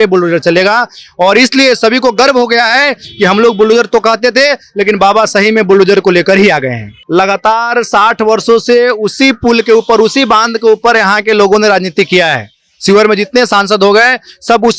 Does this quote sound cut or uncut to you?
cut